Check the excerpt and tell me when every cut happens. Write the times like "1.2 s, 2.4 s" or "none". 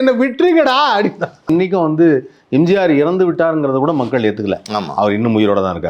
1.5 s